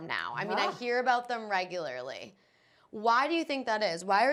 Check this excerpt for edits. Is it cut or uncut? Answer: uncut